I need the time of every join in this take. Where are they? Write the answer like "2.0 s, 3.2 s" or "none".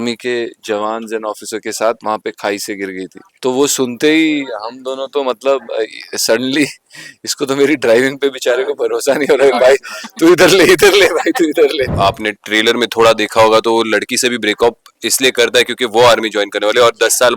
3.2 s, 11.9 s